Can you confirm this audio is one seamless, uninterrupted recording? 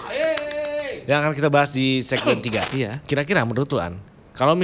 no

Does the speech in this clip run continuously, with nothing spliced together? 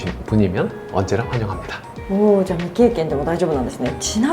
yes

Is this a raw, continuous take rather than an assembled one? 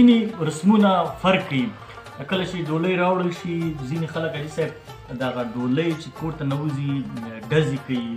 yes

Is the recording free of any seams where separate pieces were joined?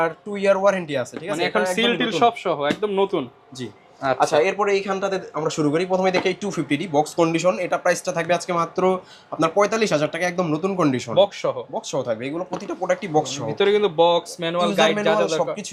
yes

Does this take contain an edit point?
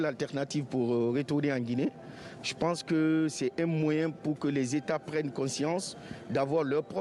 no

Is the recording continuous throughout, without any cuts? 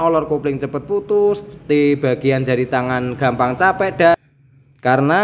no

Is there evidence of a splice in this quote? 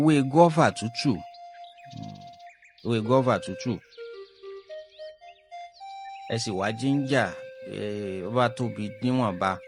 no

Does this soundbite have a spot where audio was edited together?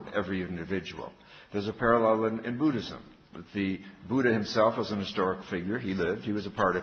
no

